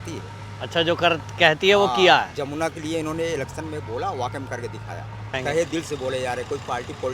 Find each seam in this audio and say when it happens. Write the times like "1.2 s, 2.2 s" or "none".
5.4 s